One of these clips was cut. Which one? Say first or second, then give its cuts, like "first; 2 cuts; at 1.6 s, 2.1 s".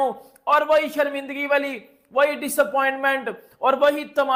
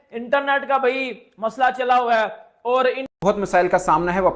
second; 1 cut; at 3.1 s